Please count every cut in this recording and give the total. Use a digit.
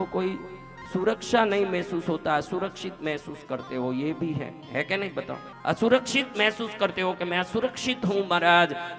1